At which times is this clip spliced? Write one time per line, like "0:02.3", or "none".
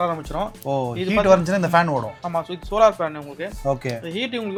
none